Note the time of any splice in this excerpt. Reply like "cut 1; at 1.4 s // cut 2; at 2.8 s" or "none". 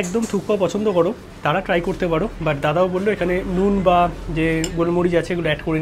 none